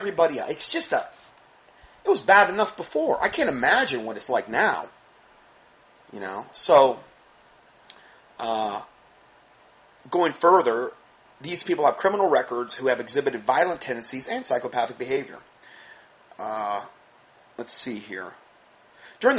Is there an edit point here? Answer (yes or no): yes